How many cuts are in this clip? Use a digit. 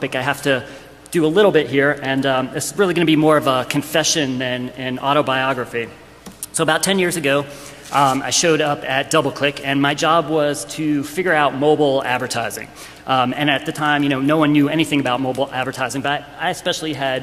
1